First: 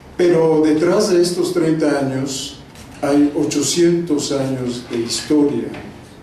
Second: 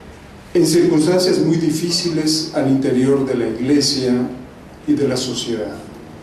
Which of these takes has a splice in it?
first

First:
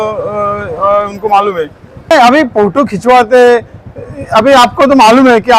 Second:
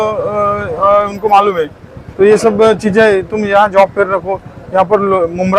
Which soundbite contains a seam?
first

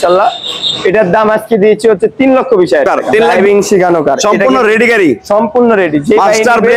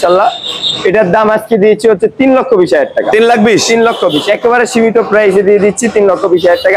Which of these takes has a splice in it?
first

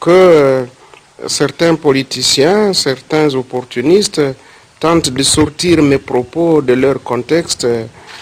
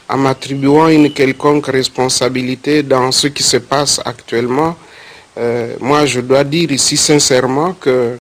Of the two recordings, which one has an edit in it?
first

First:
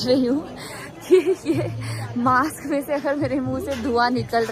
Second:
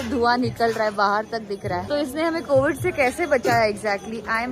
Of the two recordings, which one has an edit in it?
second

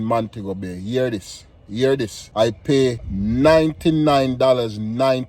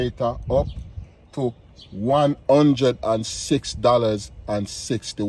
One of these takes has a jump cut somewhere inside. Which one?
first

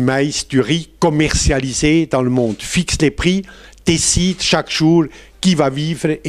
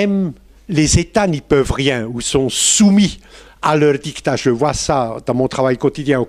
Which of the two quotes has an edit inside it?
second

